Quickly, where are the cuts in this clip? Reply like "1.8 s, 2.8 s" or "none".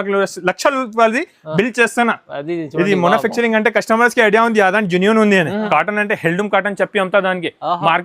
5.6 s